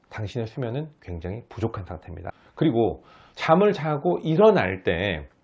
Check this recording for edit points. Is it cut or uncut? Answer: cut